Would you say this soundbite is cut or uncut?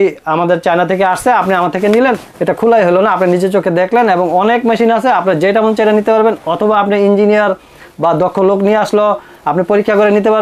uncut